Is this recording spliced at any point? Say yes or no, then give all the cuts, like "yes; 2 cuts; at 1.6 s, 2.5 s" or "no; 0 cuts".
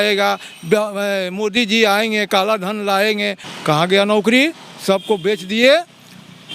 yes; 1 cut; at 3.5 s